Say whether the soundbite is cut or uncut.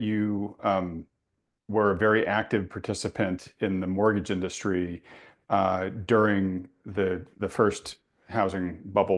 uncut